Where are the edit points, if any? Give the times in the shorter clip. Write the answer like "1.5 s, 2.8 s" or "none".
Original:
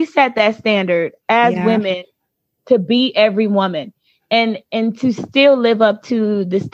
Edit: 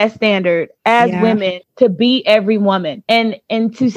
1.6 s, 2.9 s